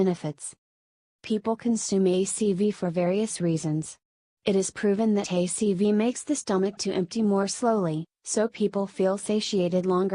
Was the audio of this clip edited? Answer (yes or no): no